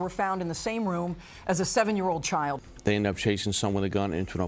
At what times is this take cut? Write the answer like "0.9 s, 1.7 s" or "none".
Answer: 2.6 s